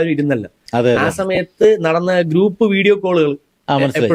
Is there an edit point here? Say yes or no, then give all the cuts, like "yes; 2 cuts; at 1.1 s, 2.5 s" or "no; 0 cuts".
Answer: no; 0 cuts